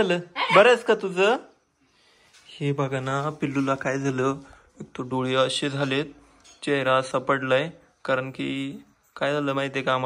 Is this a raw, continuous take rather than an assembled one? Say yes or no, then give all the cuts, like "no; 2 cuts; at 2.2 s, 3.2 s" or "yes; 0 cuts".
yes; 0 cuts